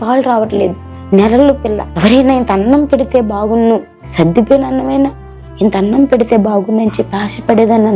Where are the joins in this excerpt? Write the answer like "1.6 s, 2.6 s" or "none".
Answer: 1.9 s, 4.0 s